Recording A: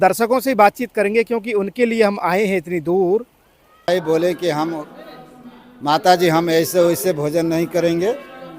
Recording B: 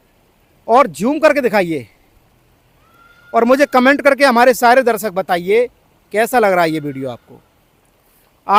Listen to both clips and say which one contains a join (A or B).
A